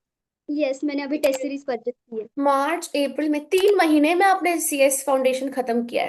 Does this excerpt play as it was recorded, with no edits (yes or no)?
no